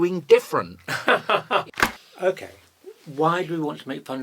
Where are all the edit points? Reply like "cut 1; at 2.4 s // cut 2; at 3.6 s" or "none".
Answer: cut 1; at 1.7 s